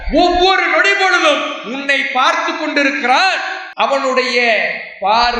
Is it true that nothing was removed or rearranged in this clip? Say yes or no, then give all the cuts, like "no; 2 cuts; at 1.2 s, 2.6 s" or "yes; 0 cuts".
no; 1 cut; at 3.6 s